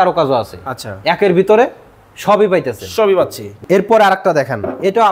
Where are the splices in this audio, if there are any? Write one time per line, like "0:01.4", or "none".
0:03.5